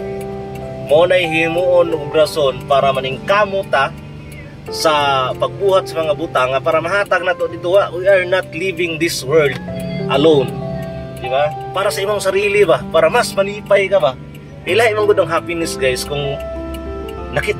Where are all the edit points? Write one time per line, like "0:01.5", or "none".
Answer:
0:11.7